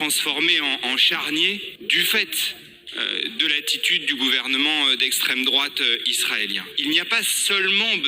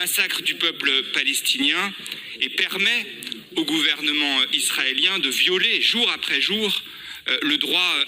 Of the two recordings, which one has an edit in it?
first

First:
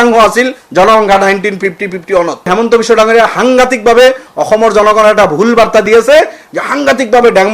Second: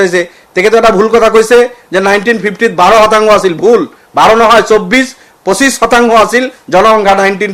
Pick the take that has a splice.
first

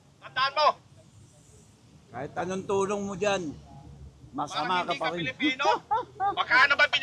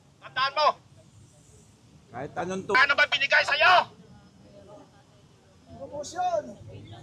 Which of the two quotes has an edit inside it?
second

